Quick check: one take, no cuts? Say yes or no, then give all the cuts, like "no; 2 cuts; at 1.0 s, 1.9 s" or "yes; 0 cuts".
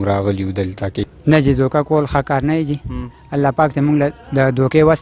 no; 1 cut; at 1.1 s